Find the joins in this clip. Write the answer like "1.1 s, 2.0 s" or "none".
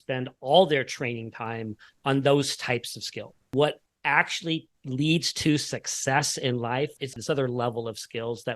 3.5 s, 7.1 s